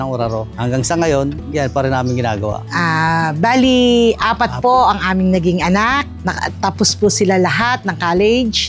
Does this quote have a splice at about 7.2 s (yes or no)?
no